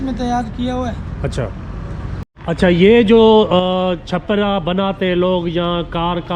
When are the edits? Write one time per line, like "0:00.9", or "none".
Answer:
0:02.3